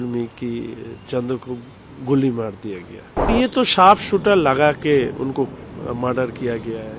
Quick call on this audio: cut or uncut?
cut